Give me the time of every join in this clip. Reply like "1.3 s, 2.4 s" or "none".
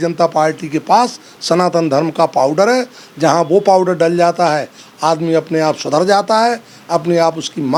none